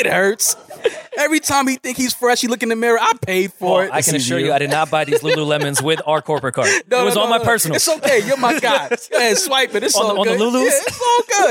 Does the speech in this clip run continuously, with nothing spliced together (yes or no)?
yes